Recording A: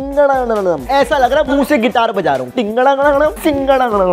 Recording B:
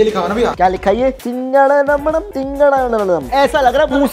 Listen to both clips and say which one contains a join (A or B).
B